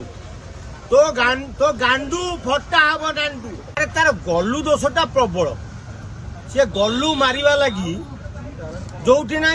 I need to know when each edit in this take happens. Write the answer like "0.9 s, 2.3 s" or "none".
3.8 s